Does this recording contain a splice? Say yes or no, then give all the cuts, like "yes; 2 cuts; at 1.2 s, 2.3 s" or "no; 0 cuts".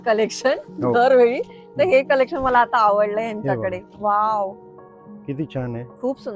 no; 0 cuts